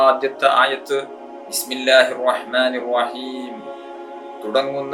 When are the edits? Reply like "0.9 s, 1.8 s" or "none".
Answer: none